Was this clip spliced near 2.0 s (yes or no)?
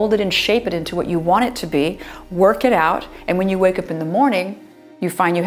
no